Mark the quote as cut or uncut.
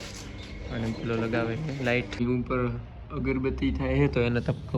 cut